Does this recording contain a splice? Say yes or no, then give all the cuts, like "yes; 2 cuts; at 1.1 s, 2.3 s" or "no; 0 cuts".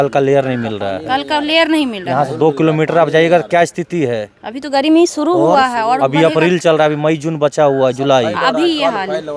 no; 0 cuts